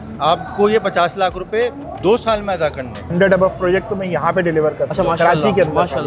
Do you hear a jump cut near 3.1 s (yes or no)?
yes